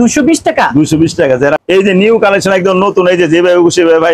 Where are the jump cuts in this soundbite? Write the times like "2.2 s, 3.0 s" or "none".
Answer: 1.6 s